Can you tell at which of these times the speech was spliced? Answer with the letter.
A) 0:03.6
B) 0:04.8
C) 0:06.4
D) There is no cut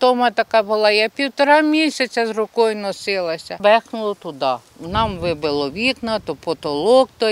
A